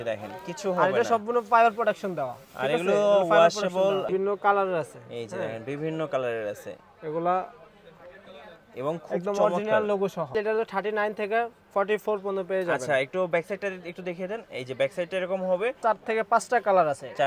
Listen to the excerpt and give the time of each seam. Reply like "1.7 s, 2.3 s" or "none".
4.1 s, 10.3 s, 15.8 s